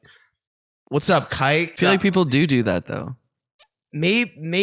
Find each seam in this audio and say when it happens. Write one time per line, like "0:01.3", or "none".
0:01.7

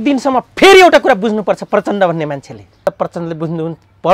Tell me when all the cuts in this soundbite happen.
0:02.9

